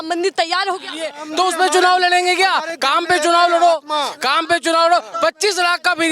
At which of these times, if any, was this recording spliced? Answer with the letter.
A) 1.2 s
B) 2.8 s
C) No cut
A